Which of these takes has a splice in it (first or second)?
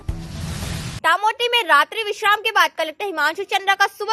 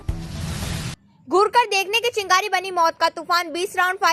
first